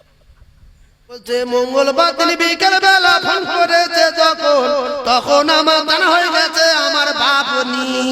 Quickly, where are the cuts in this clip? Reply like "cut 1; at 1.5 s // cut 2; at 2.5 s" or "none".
cut 1; at 1.2 s